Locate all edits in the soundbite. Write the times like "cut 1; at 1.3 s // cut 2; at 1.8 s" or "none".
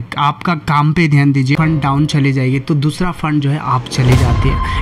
cut 1; at 1.6 s